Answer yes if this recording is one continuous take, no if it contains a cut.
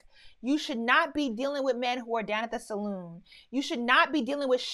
yes